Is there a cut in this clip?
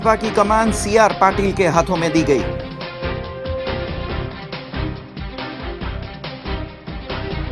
no; 0 cuts

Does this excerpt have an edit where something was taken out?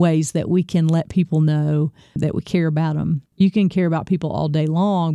yes; 2 cuts; at 2.2 s, 3.3 s

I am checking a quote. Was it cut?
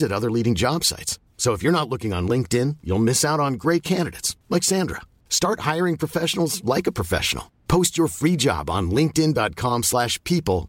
no; 0 cuts

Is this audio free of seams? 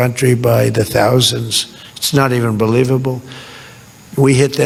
yes; 0 cuts

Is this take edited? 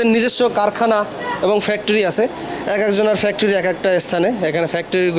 no; 0 cuts

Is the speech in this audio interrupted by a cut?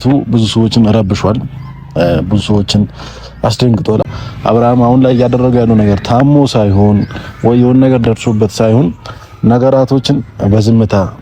yes; 1 cut; at 4.0 s

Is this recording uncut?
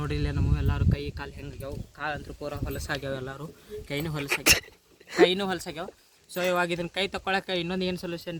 yes; 0 cuts

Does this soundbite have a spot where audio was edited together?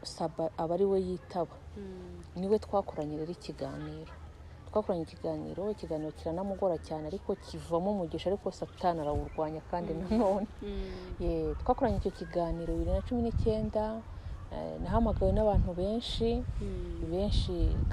no; 0 cuts

